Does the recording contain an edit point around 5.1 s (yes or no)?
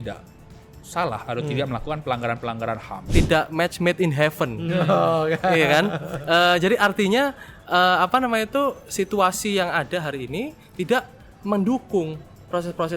no